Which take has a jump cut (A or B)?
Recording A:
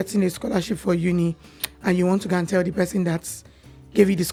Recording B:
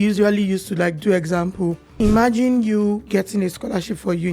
B